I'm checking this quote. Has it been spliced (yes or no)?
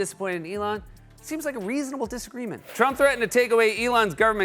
yes